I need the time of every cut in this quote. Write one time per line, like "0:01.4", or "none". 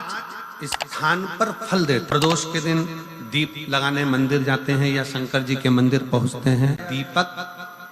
0:02.1
0:06.8